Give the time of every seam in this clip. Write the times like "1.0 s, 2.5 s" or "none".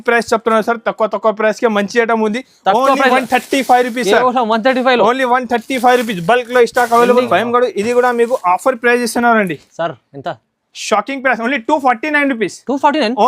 7.3 s